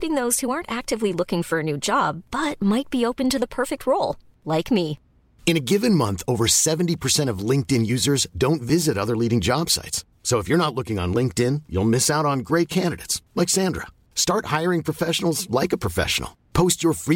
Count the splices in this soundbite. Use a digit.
0